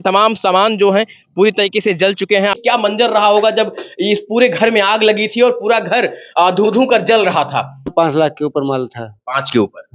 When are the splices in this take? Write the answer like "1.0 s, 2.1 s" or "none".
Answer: 2.6 s, 7.9 s